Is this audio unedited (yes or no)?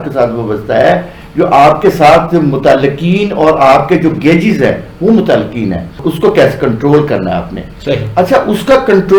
yes